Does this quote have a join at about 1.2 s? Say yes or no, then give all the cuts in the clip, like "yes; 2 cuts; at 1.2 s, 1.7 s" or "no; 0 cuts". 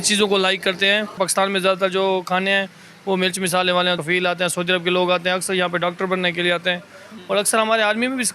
yes; 2 cuts; at 1.2 s, 4.0 s